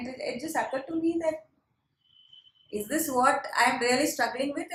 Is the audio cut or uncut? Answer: uncut